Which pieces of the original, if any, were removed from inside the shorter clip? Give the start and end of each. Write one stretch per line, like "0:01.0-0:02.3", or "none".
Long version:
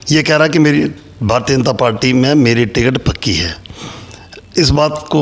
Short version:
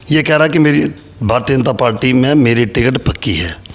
none